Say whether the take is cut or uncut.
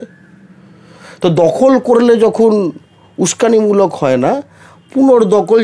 uncut